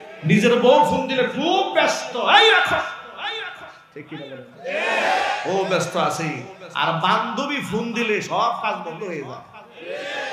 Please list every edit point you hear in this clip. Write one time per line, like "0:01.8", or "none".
none

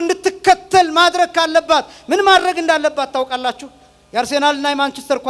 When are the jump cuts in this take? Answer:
none

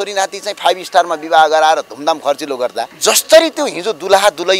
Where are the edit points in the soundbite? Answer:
0:02.9

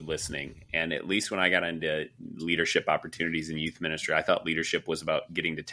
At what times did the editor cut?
none

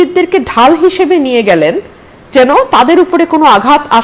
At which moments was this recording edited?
none

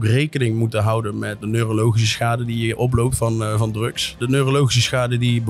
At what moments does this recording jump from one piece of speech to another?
0:01.4
0:04.1

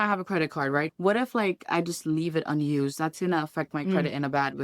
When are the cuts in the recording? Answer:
0:00.9

